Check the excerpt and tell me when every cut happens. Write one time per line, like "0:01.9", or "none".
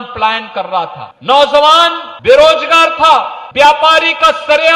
0:01.1
0:02.1
0:03.4